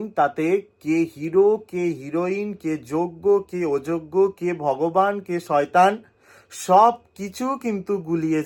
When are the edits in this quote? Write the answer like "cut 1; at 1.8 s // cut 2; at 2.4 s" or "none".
none